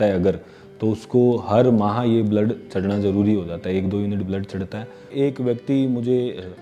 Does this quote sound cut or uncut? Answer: cut